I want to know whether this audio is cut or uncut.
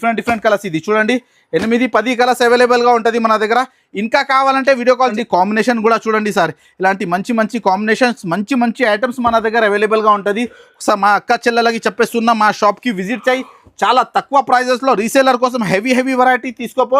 cut